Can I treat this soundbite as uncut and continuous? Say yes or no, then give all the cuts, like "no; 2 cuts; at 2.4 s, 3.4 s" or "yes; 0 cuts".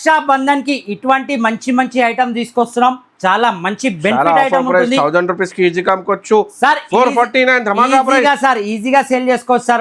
yes; 0 cuts